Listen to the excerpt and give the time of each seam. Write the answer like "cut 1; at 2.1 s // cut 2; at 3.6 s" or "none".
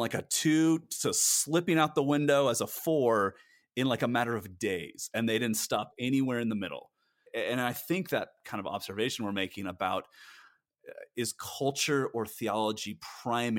cut 1; at 7.1 s // cut 2; at 8.4 s